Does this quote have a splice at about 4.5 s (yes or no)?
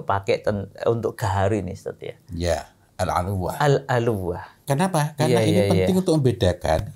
yes